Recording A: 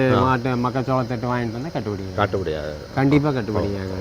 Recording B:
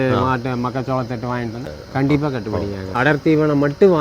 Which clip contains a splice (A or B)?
B